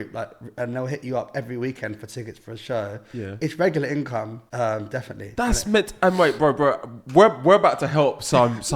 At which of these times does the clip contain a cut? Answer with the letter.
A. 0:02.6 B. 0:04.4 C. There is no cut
B